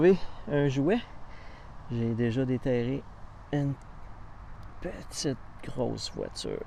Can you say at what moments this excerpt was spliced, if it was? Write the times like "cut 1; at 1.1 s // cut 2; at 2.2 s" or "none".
none